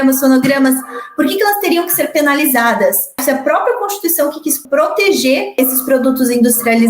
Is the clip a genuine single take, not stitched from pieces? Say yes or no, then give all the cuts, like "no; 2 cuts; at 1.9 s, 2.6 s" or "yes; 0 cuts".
no; 3 cuts; at 3.2 s, 4.6 s, 5.6 s